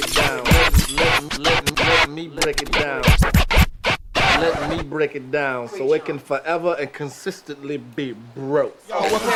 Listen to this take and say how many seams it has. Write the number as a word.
zero